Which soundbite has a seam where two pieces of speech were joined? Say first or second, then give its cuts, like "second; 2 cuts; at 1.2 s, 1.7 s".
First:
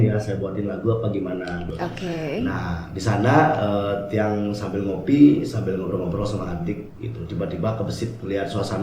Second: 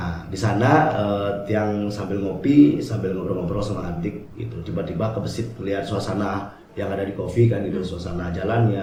first; 1 cut; at 1.7 s